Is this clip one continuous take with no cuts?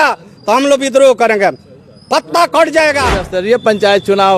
no; 1 cut; at 3.3 s

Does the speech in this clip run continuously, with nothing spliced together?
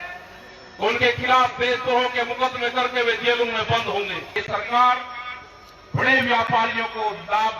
no; 1 cut; at 4.3 s

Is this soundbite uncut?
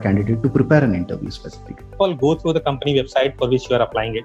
no; 1 cut; at 2.0 s

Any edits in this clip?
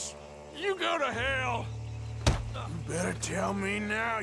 no; 0 cuts

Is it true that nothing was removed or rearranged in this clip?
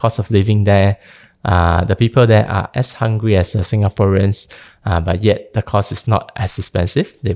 yes; 0 cuts

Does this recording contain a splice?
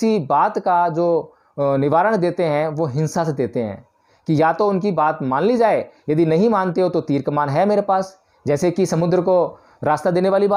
no; 0 cuts

